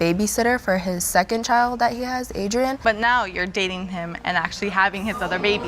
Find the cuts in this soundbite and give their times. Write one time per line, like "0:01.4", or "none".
0:02.8